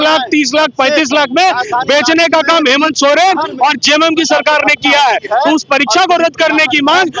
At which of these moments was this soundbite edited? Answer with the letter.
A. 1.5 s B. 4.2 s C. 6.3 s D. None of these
D